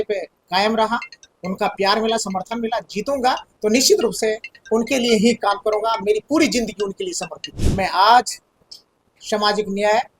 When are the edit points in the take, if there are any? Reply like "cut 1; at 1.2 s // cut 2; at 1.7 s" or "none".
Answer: cut 1; at 7.7 s